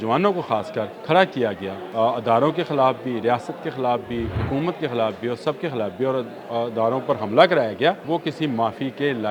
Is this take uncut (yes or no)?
no